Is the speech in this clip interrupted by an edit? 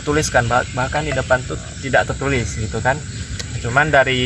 no; 0 cuts

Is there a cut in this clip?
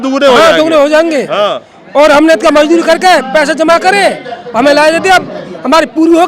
no; 0 cuts

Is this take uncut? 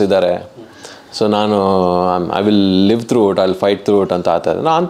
yes; 0 cuts

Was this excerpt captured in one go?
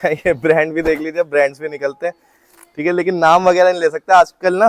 yes; 0 cuts

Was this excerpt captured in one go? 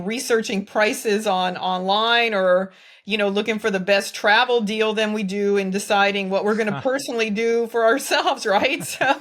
yes; 0 cuts

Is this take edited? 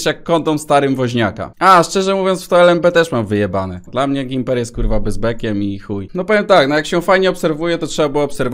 yes; 3 cuts; at 1.4 s, 3.8 s, 6.0 s

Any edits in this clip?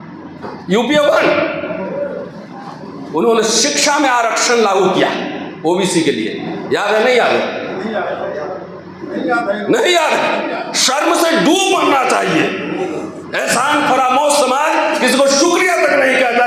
no; 0 cuts

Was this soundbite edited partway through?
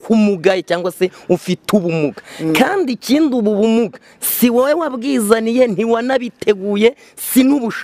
no; 0 cuts

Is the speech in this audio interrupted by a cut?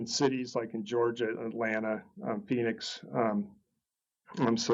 no; 0 cuts

